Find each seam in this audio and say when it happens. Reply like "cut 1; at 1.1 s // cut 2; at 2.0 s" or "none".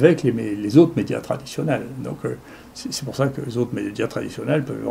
none